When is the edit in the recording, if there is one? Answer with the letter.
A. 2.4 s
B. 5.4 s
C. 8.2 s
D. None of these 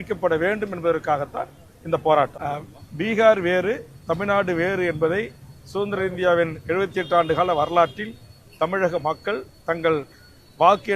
A